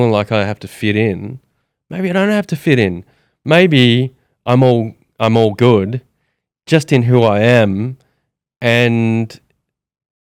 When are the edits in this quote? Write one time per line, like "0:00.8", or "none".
none